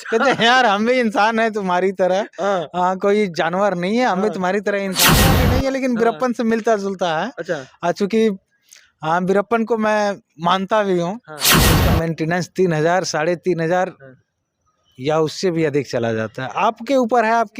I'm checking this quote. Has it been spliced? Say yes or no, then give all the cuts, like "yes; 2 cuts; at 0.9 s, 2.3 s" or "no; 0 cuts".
yes; 2 cuts; at 5.3 s, 11.8 s